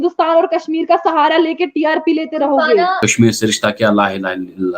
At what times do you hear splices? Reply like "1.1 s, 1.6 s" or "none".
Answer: 3.0 s